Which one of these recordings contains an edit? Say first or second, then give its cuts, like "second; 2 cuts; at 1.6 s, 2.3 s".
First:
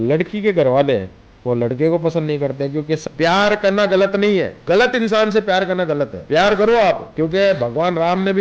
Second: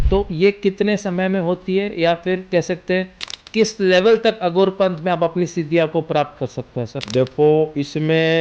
first; 4 cuts; at 3.0 s, 4.5 s, 6.2 s, 7.1 s